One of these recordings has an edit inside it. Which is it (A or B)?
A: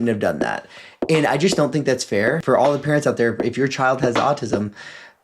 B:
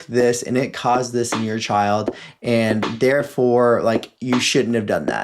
A